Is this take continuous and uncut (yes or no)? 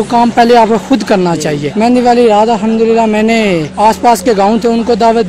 no